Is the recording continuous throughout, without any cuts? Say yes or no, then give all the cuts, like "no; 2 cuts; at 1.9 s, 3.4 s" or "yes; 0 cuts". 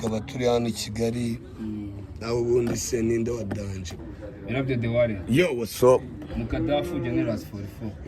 no; 1 cut; at 3.9 s